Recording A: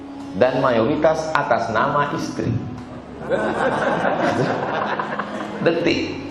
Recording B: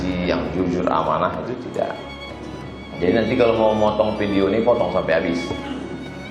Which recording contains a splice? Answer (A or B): B